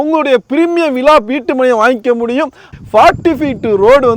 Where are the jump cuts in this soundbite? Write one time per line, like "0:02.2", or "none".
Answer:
0:02.7